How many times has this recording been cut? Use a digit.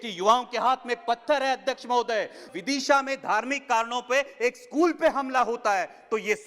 1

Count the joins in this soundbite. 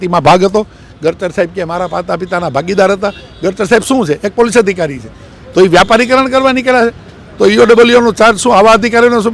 0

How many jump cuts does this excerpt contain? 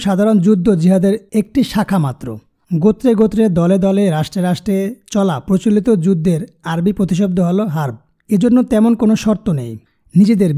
0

